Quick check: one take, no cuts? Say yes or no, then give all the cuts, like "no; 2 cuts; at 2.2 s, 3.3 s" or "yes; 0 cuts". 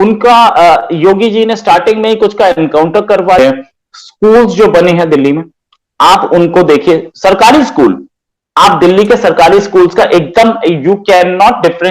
no; 1 cut; at 3.4 s